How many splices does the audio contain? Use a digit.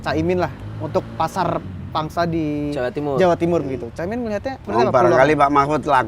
1